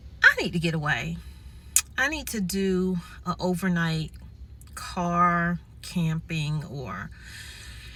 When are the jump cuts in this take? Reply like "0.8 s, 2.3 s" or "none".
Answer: none